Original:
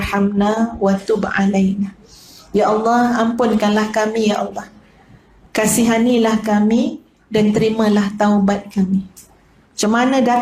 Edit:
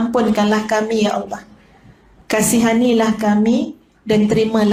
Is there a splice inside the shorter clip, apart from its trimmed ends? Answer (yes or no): no